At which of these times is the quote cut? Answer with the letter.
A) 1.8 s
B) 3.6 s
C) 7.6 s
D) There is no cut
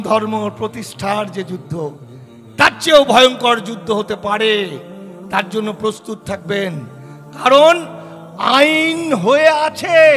D